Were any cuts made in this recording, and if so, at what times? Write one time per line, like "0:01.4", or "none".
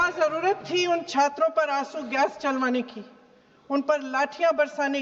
none